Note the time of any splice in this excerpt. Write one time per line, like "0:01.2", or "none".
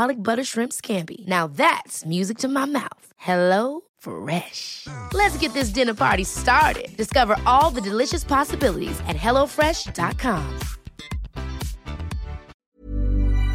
0:12.5

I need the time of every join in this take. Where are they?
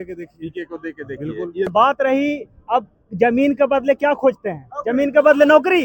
0:01.7

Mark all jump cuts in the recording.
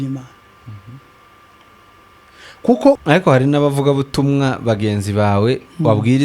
0:03.0

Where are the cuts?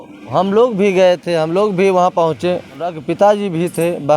0:03.2

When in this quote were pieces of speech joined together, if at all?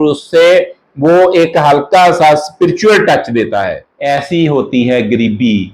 0:03.9

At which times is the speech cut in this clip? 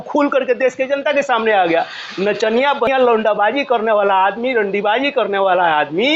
0:02.9

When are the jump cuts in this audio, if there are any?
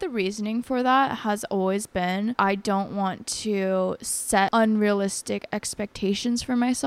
0:02.3
0:04.5

